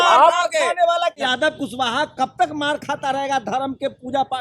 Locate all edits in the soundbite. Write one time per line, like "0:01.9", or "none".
0:01.2